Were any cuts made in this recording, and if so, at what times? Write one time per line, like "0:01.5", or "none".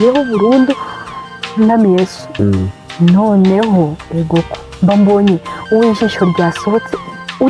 0:02.2